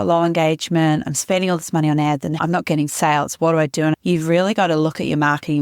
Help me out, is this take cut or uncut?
cut